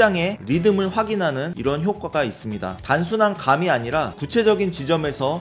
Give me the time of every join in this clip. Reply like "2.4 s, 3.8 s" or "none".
2.8 s